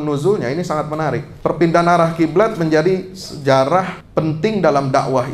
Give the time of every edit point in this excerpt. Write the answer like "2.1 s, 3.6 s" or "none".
1.3 s, 4.0 s